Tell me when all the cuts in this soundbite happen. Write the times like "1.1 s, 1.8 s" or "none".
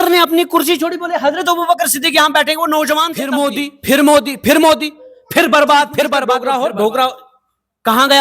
3.2 s, 6.3 s